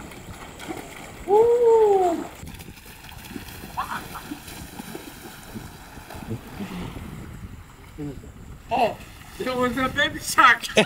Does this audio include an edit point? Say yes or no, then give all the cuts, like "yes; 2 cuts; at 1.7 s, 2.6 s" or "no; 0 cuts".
yes; 1 cut; at 2.4 s